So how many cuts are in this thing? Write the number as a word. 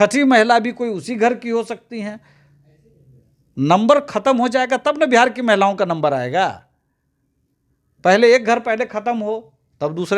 zero